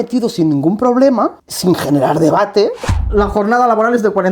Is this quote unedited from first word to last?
no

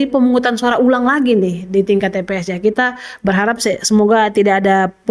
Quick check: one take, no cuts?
yes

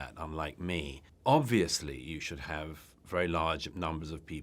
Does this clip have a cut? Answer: yes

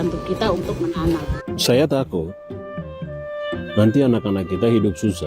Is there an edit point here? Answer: yes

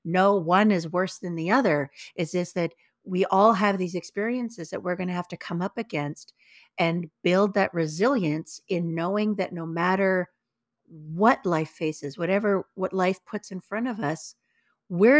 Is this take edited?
no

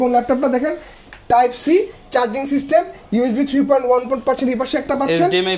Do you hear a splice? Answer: no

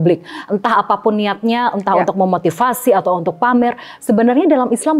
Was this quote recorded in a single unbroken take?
yes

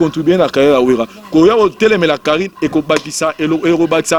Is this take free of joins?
yes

